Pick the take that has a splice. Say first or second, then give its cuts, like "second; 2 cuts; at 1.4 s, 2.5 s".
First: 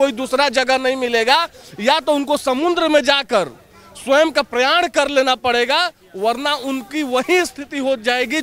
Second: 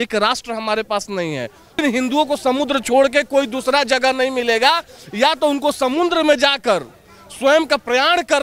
second; 1 cut; at 1.8 s